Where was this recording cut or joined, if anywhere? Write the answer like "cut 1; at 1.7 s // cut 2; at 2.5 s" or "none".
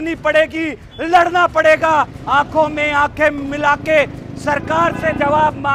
none